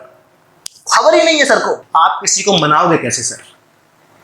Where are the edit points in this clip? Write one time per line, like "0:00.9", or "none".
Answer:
0:01.8